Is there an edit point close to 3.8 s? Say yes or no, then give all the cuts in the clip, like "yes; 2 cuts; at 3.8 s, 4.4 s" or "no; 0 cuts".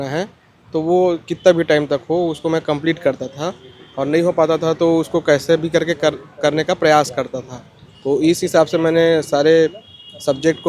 no; 0 cuts